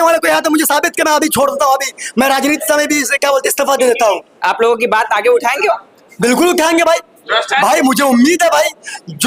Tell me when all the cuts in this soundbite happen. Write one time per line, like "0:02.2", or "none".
none